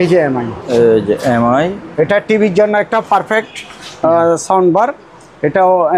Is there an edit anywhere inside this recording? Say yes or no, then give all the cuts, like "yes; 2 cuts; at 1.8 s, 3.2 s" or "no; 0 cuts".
no; 0 cuts